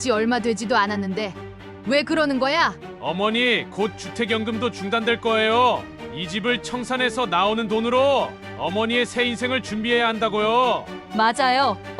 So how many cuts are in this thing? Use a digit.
1